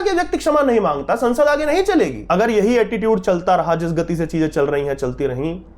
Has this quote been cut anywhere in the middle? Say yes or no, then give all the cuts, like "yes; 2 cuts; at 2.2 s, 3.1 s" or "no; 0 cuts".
yes; 1 cut; at 2.2 s